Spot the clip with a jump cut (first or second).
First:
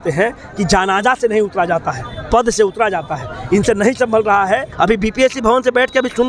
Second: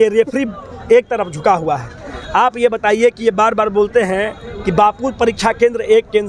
first